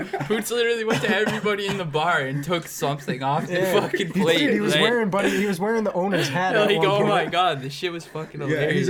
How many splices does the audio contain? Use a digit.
0